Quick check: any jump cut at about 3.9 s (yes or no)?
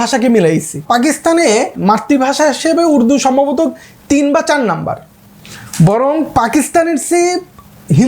no